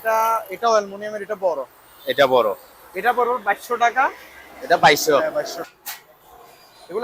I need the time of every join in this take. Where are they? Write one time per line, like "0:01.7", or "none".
0:05.6